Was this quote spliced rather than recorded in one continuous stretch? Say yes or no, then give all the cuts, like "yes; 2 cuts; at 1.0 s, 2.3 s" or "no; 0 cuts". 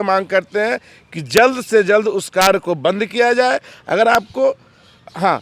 no; 0 cuts